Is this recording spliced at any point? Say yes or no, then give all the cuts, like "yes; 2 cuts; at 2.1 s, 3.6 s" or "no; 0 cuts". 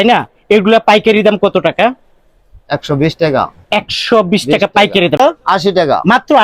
yes; 1 cut; at 5.2 s